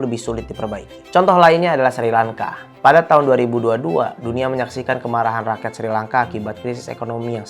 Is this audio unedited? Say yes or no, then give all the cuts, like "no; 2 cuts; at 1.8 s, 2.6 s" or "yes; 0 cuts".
yes; 0 cuts